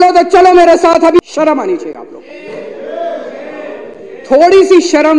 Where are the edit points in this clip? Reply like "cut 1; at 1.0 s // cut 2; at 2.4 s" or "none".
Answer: cut 1; at 1.2 s